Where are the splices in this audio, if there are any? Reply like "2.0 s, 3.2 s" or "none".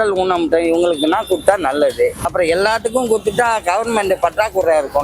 2.3 s